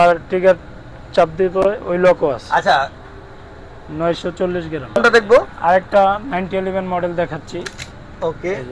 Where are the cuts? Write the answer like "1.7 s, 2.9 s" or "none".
3.0 s, 5.0 s

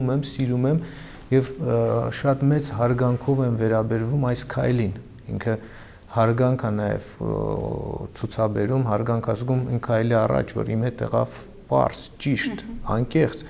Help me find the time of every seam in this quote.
none

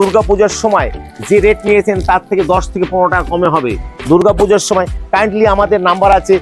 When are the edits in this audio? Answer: none

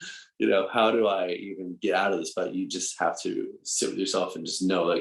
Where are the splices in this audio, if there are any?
3.6 s

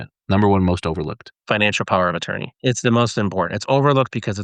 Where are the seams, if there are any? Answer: 1.3 s, 2.6 s

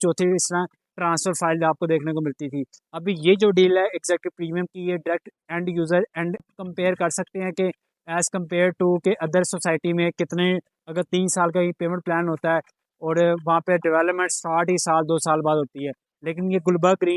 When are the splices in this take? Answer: 6.5 s

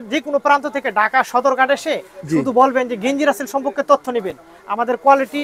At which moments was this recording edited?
none

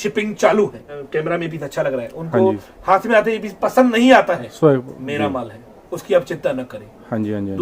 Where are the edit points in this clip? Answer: 0.9 s

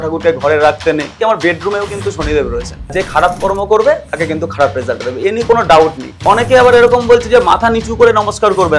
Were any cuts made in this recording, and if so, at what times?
1.1 s, 2.9 s, 6.2 s

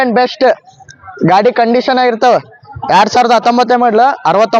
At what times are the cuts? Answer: none

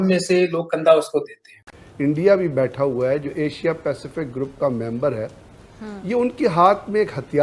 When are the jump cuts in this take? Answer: 1.8 s

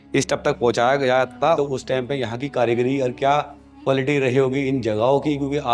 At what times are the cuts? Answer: 1.6 s

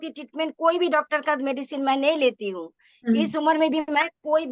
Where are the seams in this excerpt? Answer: none

